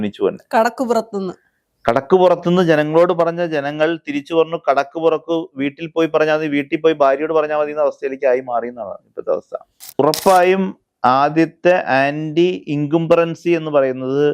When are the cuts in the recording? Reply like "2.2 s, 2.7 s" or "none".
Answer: 10.0 s